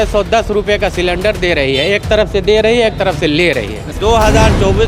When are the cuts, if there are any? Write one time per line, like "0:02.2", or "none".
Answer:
0:03.9